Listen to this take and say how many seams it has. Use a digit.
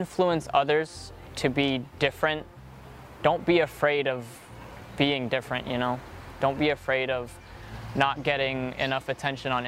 0